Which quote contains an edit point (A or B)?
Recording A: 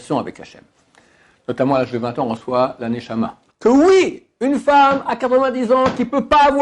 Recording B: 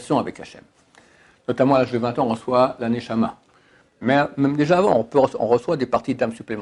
A